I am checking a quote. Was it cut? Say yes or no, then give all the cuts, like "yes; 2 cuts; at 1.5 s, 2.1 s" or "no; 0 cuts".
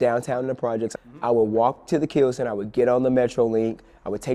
yes; 1 cut; at 1.0 s